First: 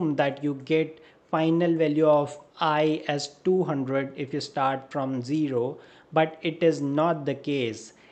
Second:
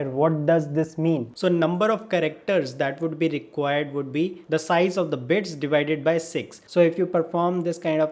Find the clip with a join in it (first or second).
second